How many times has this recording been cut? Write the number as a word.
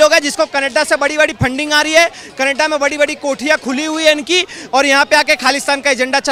zero